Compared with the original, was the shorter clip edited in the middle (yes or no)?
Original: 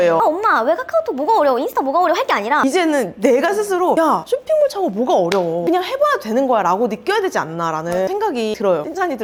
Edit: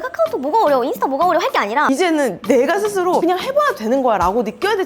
yes